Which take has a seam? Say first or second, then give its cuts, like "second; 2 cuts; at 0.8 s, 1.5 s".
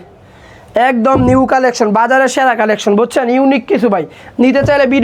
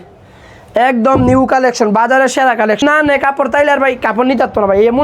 second; 1 cut; at 2.8 s